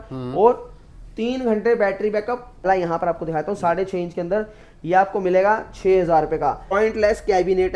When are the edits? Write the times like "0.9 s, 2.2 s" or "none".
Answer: 2.6 s, 6.8 s